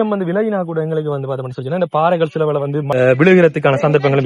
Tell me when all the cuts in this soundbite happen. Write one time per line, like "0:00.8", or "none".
0:02.9